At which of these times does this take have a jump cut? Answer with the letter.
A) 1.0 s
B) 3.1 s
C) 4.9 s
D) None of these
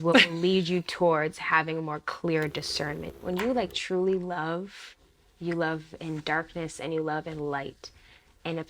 B